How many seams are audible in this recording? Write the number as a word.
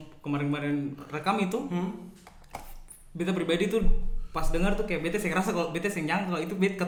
zero